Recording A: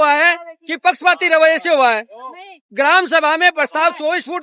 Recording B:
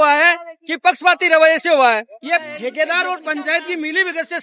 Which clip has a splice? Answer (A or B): B